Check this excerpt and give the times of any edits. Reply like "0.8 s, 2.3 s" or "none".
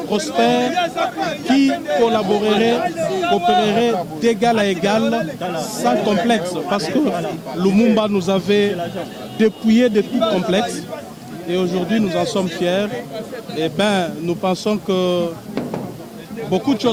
none

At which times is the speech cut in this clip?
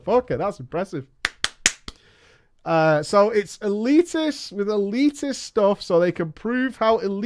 none

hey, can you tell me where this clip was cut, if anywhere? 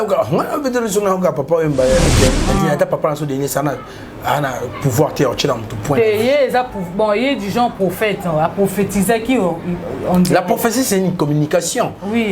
2.1 s

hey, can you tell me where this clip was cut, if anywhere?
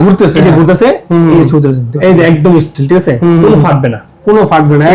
1.9 s

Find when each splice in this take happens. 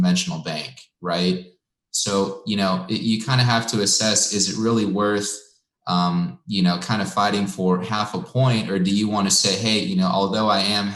none

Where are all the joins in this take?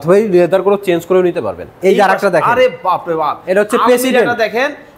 1.7 s

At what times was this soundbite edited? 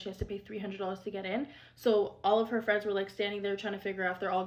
1.5 s

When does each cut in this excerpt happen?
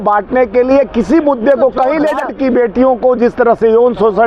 2.3 s

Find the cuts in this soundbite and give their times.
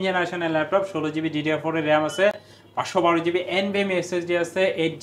none

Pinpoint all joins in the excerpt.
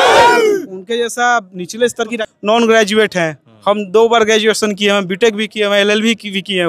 2.2 s

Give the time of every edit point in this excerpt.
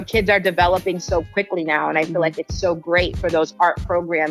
none

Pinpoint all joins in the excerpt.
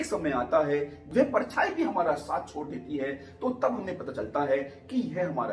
1.0 s

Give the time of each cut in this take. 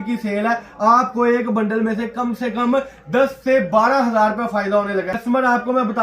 5.1 s

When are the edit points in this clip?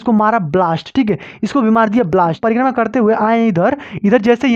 2.4 s

